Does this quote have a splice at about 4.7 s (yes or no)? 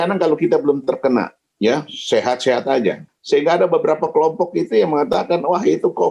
no